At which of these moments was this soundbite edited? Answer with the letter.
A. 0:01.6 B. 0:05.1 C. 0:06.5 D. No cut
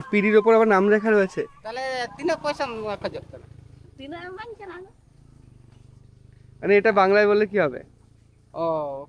A